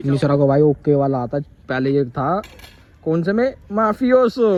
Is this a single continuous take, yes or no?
yes